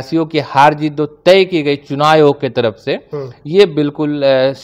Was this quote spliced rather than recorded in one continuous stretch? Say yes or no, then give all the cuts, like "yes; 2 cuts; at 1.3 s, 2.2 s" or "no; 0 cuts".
no; 0 cuts